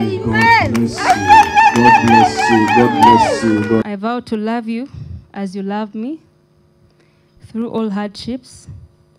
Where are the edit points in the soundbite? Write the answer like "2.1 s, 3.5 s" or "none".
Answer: 3.8 s